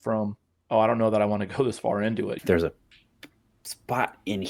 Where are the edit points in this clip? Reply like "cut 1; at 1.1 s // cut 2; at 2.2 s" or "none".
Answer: cut 1; at 2.3 s